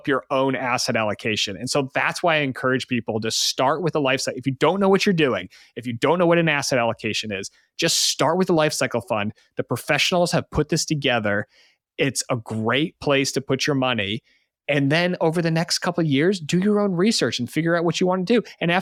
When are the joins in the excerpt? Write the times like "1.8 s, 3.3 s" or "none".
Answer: none